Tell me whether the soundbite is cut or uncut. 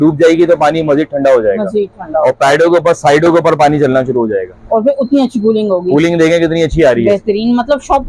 uncut